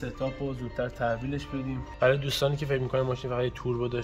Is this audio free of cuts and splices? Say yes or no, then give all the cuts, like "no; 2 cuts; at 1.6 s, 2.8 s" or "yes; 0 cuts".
yes; 0 cuts